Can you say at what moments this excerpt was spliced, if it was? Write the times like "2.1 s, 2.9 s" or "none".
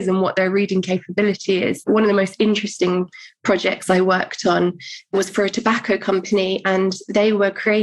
1.8 s, 5.1 s

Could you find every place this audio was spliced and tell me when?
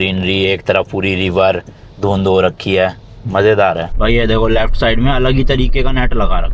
3.9 s

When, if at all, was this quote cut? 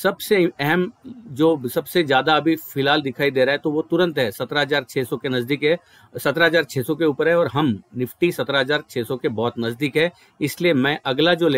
none

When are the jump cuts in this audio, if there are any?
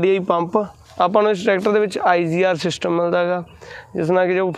1.0 s

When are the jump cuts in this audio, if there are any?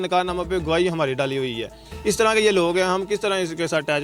none

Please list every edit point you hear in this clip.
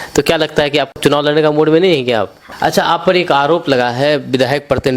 0.9 s, 2.4 s

